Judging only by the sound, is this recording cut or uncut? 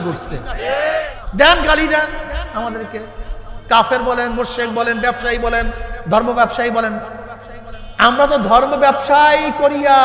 cut